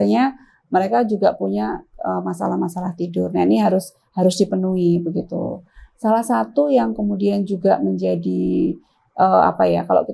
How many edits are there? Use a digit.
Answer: 0